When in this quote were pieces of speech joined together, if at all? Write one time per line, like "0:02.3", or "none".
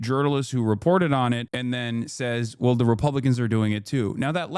0:01.5